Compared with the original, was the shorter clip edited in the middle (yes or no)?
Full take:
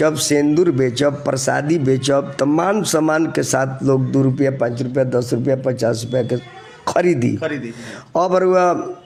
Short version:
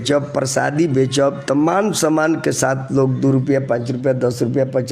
no